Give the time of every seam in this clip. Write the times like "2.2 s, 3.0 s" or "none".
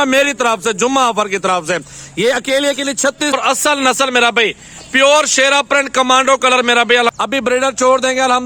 3.4 s, 7.1 s

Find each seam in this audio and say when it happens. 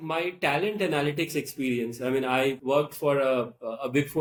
none

